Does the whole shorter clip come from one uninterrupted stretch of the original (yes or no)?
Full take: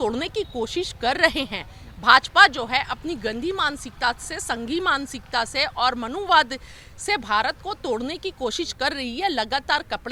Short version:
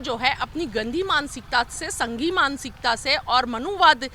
yes